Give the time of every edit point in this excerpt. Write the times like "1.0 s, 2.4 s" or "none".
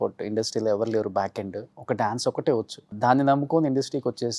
1.7 s, 3.0 s